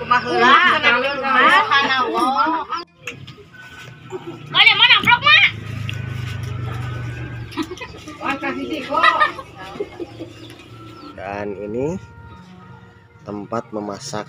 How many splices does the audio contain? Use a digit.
1